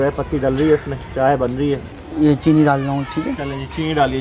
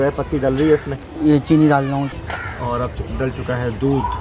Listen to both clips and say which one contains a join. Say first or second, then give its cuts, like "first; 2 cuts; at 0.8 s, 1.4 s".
second; 2 cuts; at 1.0 s, 2.1 s